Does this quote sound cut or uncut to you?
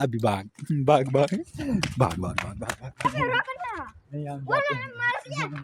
cut